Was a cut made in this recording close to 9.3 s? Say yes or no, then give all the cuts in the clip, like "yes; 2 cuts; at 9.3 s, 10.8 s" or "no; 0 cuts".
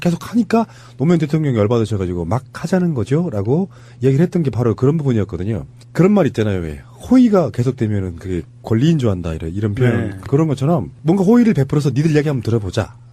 no; 0 cuts